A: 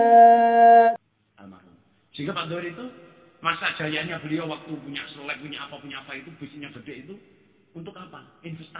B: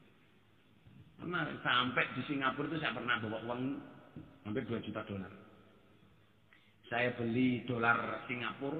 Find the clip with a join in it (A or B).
A